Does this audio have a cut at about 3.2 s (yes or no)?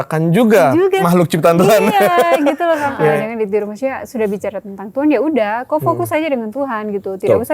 yes